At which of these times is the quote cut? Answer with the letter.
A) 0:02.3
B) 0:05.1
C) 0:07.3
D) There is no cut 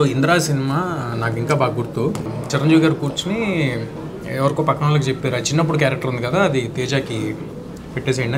A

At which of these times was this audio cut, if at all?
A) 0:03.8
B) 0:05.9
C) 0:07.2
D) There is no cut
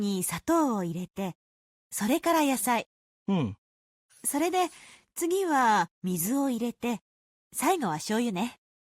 A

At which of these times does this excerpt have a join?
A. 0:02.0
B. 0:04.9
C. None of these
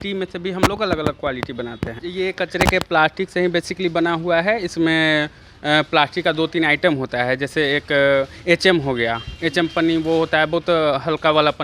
A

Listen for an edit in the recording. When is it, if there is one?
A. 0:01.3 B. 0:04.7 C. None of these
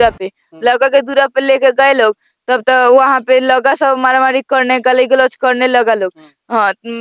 C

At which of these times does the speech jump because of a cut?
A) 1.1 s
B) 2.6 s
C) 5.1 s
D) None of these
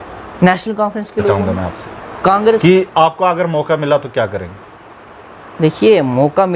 B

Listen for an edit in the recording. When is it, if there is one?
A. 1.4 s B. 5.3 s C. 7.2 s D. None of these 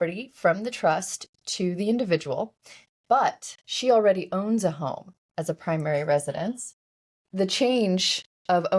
C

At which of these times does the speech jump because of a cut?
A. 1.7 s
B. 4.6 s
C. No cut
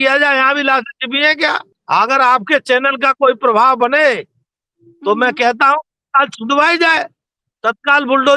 A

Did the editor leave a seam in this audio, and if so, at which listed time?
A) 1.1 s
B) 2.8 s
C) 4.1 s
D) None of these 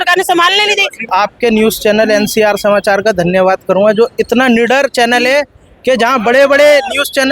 A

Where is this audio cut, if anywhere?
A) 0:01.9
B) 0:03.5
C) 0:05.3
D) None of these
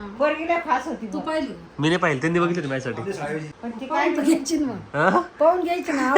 B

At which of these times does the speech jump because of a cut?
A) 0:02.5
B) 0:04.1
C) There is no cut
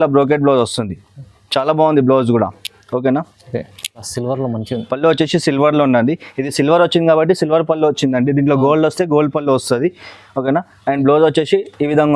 B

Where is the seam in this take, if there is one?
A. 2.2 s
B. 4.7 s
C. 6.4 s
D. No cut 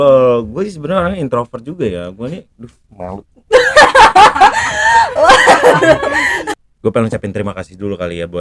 C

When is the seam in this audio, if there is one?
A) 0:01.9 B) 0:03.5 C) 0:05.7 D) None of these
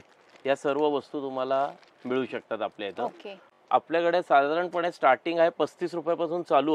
B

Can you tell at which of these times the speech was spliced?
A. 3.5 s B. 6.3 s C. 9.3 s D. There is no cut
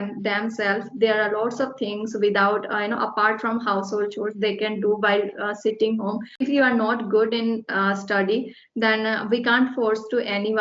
B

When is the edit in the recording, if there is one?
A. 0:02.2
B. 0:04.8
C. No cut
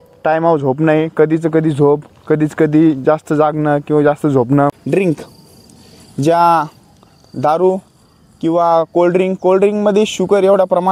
B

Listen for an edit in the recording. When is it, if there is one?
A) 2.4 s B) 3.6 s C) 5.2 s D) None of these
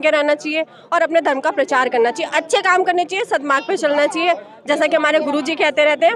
D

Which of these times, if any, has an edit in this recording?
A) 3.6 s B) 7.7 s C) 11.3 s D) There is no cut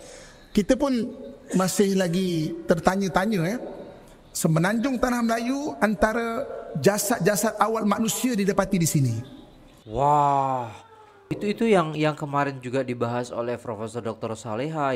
C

